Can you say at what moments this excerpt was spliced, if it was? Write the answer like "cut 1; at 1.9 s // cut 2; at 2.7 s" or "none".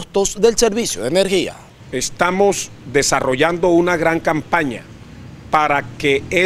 none